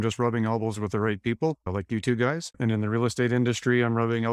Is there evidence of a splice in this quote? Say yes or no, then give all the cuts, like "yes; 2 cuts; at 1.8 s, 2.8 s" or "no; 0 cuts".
no; 0 cuts